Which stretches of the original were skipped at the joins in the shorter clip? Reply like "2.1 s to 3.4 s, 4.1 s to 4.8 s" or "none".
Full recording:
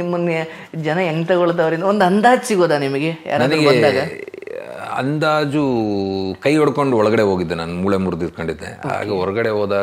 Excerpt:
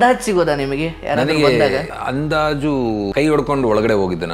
4.2 s to 4.8 s, 6.0 s to 6.4 s